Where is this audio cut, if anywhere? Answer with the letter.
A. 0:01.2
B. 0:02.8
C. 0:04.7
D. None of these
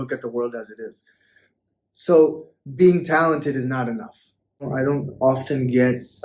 C